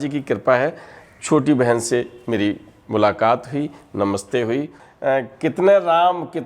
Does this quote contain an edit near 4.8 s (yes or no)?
yes